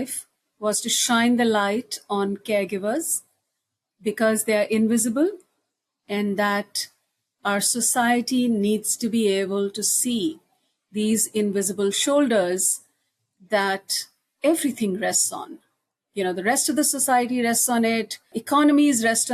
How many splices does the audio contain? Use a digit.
1